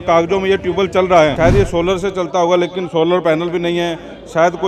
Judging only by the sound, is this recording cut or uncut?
cut